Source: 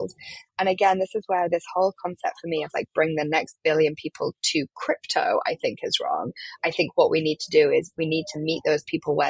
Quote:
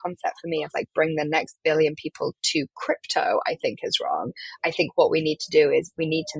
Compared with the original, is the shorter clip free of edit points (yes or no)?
yes